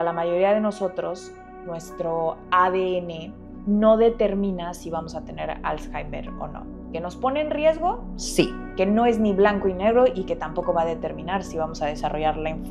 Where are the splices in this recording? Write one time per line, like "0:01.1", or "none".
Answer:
none